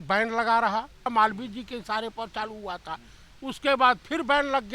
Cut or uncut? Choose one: cut